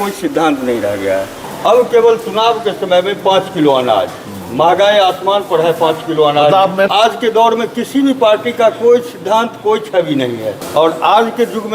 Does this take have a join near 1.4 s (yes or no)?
yes